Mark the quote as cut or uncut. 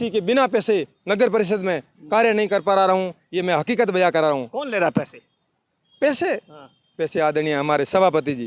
uncut